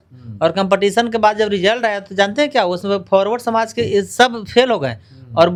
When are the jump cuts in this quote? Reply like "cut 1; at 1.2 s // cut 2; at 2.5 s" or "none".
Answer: none